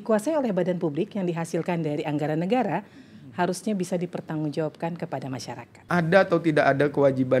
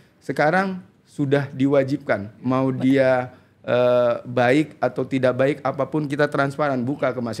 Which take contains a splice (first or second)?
first